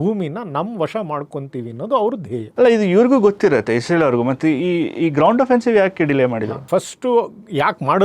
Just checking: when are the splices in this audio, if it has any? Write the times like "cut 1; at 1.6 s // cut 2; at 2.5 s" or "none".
none